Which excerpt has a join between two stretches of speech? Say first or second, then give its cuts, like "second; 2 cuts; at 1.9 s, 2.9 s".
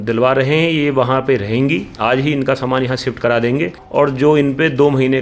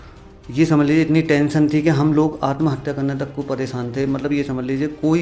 first; 1 cut; at 3.8 s